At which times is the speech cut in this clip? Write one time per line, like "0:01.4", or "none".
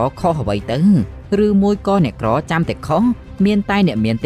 none